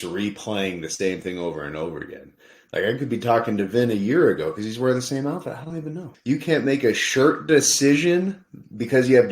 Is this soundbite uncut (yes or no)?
no